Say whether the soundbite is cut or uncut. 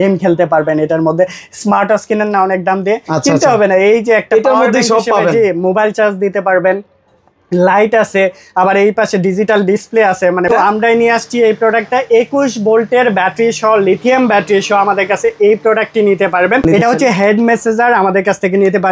cut